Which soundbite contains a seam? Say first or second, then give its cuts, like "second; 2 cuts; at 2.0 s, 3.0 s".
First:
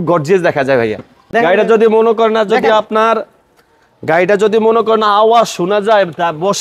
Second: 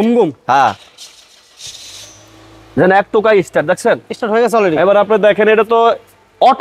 first; 1 cut; at 1.1 s